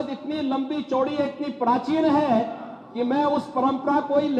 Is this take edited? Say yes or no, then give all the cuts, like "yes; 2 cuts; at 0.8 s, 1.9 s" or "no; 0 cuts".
no; 0 cuts